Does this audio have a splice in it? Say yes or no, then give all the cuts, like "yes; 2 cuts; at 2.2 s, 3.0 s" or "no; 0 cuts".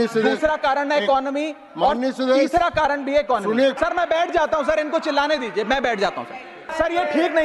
yes; 2 cuts; at 3.8 s, 6.7 s